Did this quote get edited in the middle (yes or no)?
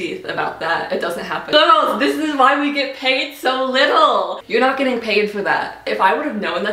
yes